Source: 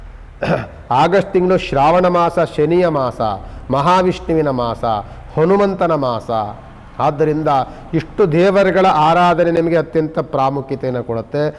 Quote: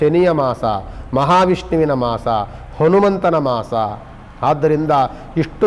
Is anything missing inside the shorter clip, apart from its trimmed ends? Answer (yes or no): no